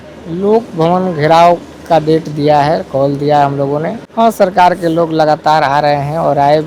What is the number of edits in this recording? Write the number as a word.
one